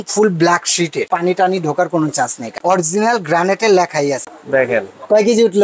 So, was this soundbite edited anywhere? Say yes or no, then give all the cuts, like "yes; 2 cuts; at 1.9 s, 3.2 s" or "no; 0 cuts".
yes; 3 cuts; at 1.0 s, 2.4 s, 4.2 s